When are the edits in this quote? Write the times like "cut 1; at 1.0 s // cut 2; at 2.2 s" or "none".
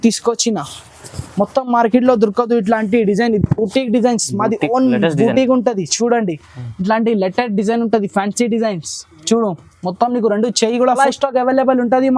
cut 1; at 11.0 s